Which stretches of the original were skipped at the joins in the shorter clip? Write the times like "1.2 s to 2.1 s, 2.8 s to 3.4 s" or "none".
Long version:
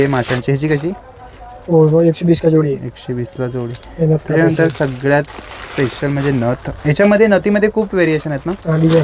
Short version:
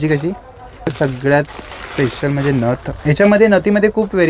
1.5 s to 4.7 s